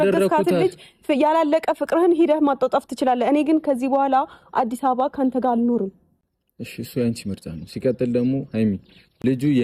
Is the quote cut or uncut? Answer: uncut